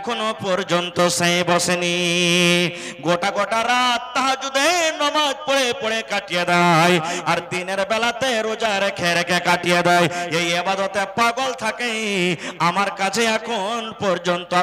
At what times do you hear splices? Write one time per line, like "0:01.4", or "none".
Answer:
none